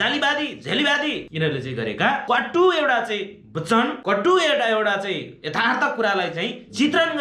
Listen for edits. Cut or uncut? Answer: cut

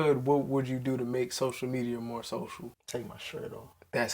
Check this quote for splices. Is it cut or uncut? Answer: cut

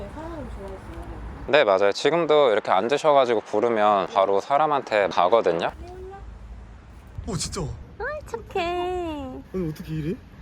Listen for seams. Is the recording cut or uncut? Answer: cut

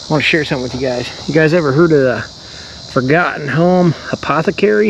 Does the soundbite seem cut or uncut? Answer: uncut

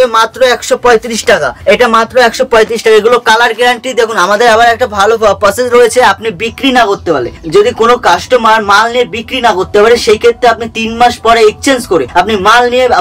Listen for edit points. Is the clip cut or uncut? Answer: uncut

